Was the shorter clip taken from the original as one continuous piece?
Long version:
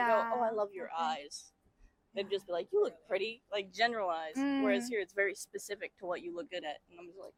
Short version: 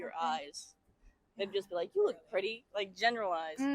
yes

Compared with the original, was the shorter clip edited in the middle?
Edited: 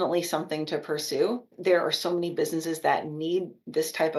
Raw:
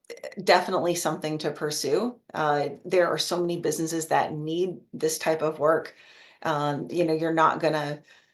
yes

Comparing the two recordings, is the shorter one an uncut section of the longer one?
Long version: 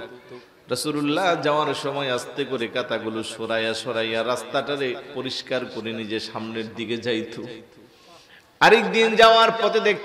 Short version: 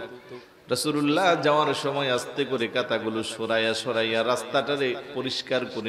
yes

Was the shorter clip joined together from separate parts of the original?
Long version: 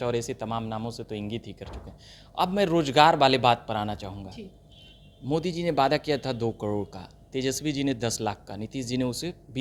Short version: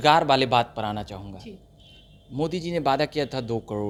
no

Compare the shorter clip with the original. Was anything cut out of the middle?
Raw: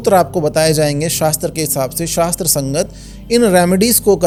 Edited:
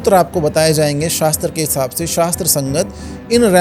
no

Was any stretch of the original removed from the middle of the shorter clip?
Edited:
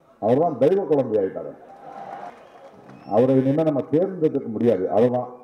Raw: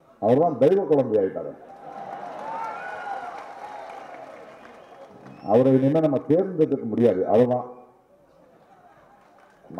yes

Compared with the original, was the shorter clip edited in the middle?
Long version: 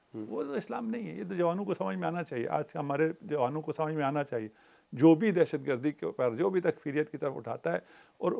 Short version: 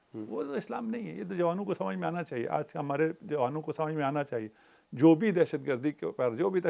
no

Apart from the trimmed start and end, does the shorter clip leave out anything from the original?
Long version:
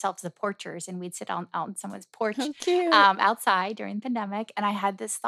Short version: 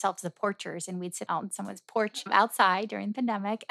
yes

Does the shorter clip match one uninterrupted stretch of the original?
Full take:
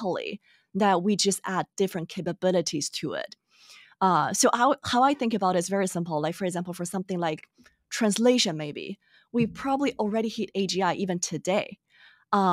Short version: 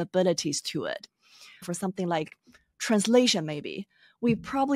no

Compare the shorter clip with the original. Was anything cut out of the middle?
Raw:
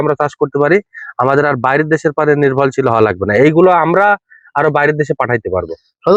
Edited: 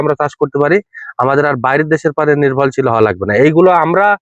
no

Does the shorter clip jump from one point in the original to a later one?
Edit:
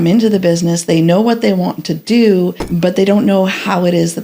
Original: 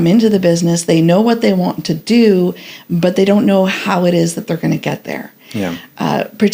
yes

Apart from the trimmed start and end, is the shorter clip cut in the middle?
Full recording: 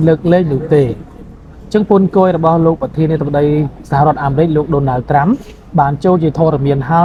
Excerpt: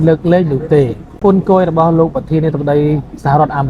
yes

